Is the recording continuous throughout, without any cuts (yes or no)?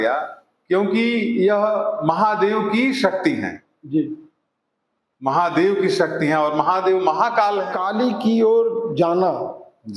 no